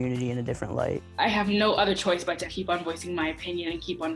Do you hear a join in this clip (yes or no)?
yes